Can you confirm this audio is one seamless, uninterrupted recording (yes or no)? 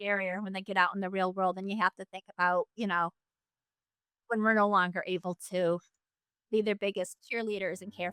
no